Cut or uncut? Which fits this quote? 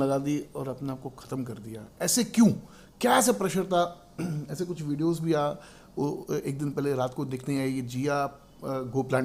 uncut